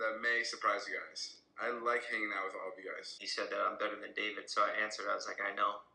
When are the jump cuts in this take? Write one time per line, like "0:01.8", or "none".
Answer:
0:03.2